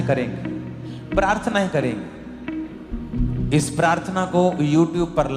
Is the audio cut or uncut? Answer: cut